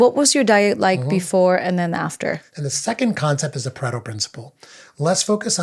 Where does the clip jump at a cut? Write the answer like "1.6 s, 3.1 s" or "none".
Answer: 2.5 s